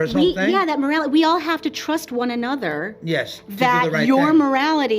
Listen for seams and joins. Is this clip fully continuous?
yes; 0 cuts

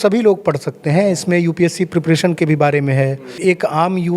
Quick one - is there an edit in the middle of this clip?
yes; 1 cut; at 3.3 s

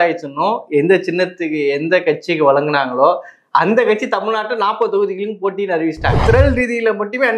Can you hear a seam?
yes; 1 cut; at 6.2 s

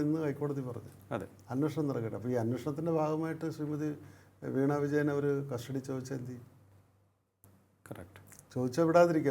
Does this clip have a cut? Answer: no; 0 cuts

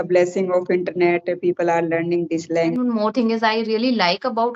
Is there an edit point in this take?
yes; 1 cut; at 2.8 s

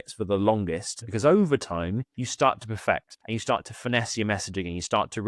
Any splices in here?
yes; 3 cuts; at 1.1 s, 2.2 s, 3.1 s

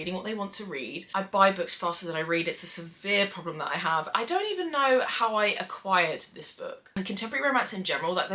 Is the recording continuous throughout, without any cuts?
no; 3 cuts; at 1.0 s, 4.1 s, 7.0 s

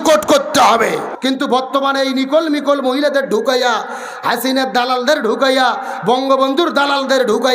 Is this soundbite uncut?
no; 1 cut; at 1.1 s

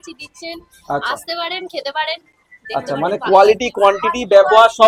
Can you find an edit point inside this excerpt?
no; 0 cuts

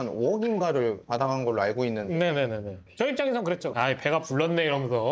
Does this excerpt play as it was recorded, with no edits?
no; 1 cut; at 2.8 s

